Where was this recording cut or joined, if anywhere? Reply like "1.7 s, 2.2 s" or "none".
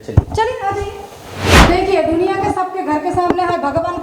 1.7 s